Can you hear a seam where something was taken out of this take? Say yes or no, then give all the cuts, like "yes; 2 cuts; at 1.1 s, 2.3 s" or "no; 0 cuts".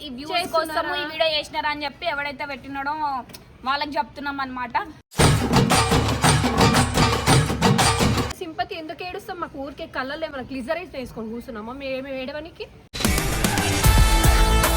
yes; 1 cut; at 8.3 s